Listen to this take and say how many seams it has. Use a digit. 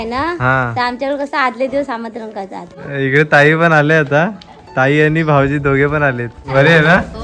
2